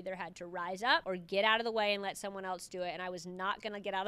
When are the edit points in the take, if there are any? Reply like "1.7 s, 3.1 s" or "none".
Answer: 1.0 s